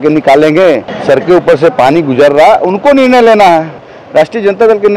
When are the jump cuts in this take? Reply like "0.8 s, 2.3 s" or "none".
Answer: 0.9 s, 3.9 s